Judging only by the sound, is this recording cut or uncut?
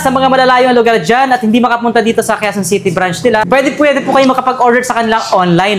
cut